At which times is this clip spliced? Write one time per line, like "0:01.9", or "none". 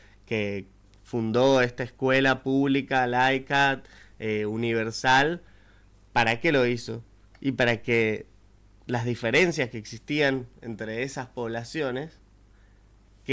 none